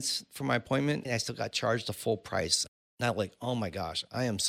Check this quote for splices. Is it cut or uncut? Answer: cut